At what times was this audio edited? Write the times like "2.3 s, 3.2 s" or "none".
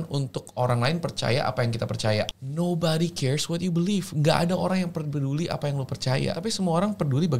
2.4 s, 6.4 s